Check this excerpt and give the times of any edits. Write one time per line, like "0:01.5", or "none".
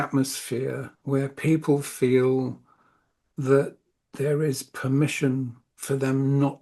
0:00.9

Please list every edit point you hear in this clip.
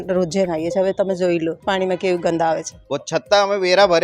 0:01.6
0:02.7

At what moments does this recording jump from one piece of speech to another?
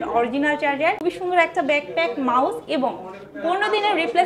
0:01.0

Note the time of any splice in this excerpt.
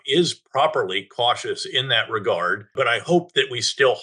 0:02.7

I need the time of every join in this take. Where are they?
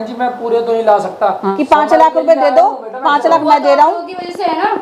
0:01.5

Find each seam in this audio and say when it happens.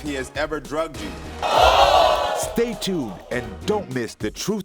0:01.2
0:02.5

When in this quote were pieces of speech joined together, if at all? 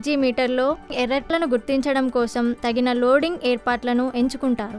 0:01.1
0:02.6

